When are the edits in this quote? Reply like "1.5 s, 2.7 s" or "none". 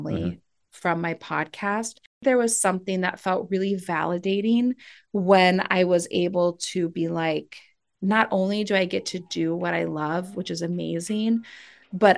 2.2 s

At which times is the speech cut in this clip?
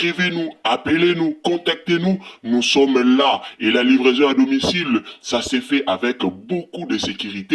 none

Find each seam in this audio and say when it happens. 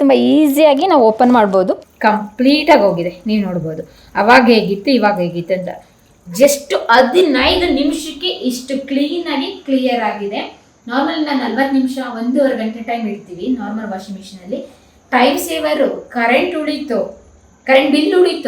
1.8 s

